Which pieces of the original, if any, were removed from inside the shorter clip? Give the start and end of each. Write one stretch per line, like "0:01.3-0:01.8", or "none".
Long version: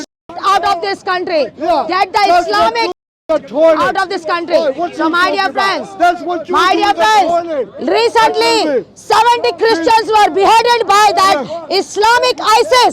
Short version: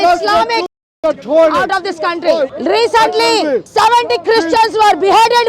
0:04.8-0:07.7
0:08.9-0:09.0